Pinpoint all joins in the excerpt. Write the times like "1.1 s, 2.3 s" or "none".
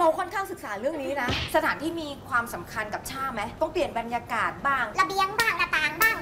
1.4 s, 3.5 s, 4.9 s